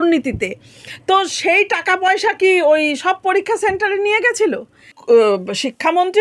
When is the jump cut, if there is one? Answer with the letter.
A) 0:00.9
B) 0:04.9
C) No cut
B